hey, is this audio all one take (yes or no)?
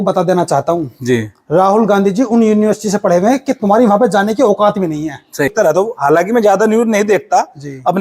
no